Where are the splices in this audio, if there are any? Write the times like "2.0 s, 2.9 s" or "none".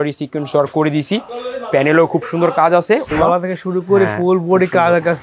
3.1 s